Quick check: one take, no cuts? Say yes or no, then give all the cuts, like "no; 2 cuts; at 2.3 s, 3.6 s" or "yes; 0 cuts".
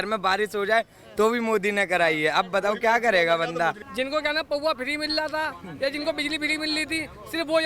no; 1 cut; at 3.8 s